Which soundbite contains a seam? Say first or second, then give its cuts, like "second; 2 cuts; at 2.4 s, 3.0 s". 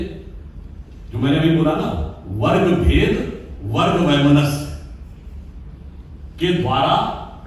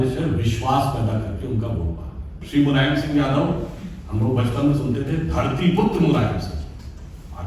second; 1 cut; at 2.4 s